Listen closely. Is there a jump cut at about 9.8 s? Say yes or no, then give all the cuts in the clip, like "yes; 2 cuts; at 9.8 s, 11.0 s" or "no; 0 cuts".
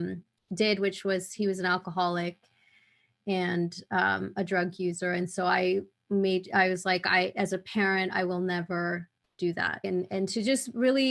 yes; 1 cut; at 9.8 s